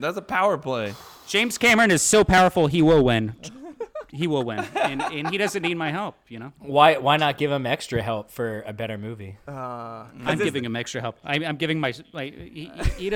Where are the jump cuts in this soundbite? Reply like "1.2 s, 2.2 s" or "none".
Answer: 1.4 s